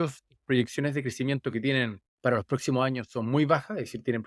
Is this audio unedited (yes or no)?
no